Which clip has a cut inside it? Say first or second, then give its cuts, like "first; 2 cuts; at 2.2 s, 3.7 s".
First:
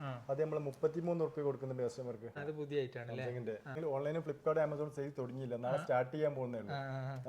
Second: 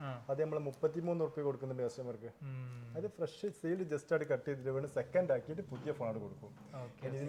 first; 2 cuts; at 2.4 s, 3.8 s